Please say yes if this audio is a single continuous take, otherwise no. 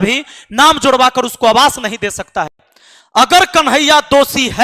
no